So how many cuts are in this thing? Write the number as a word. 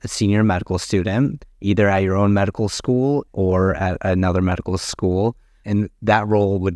two